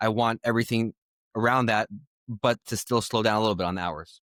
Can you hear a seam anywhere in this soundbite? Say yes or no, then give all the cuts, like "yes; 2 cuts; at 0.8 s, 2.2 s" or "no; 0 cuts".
no; 0 cuts